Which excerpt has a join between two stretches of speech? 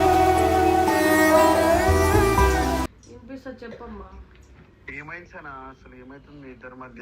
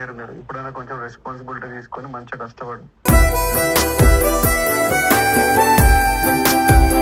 first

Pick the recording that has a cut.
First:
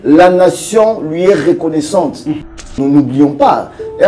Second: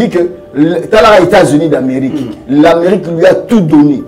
first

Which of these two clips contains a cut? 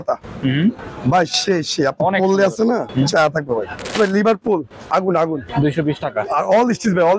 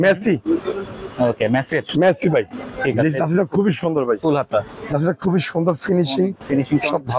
first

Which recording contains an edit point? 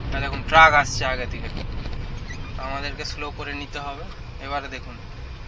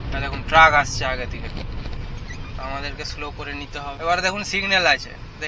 second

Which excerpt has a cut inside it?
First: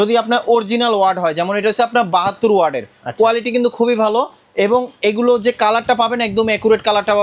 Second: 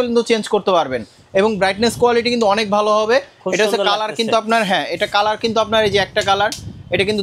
second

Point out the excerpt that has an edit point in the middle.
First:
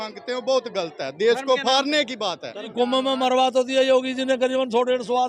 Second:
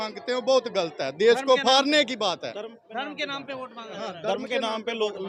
first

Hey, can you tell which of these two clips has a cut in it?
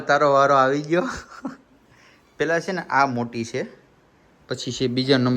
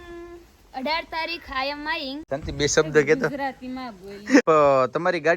second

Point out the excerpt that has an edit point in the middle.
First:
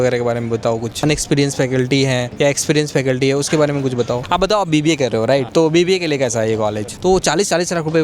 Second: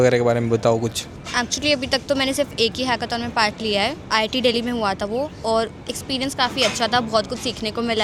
first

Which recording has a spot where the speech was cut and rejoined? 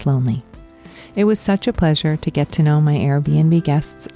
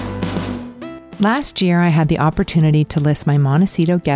second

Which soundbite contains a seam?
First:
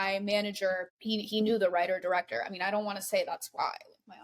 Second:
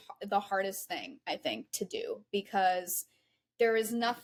first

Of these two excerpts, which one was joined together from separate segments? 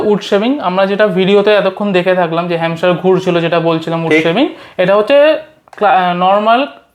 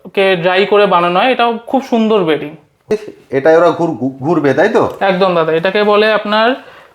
second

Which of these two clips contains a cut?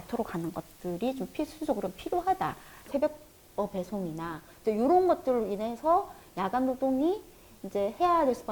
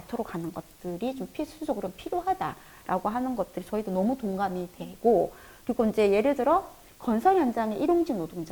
first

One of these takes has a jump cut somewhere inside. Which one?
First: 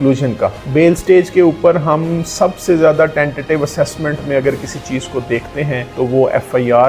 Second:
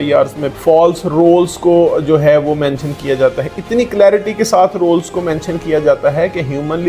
first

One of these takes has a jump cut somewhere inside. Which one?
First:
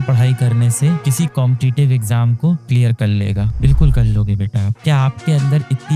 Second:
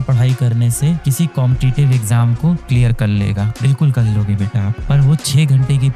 first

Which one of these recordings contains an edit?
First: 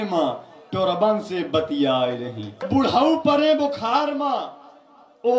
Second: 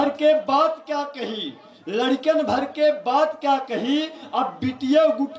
first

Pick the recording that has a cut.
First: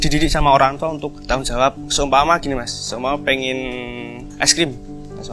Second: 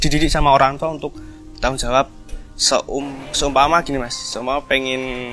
first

